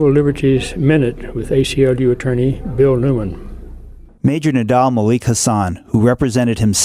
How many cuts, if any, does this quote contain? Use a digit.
0